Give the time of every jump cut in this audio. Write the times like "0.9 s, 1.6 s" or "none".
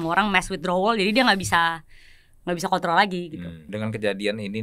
3.6 s

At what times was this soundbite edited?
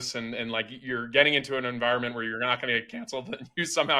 none

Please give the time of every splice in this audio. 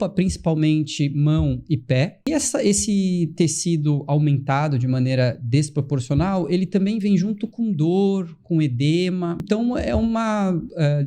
2.3 s, 9.4 s

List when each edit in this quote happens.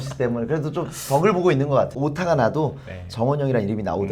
1.9 s

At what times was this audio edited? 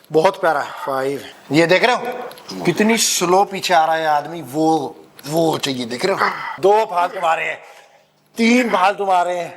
1.3 s, 6.5 s

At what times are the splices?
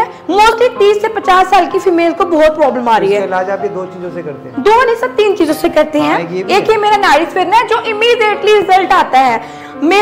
none

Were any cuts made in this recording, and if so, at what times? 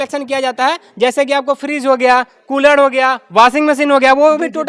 none

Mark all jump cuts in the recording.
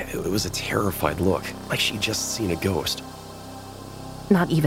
3.6 s

